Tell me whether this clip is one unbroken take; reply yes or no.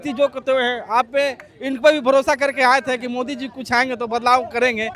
yes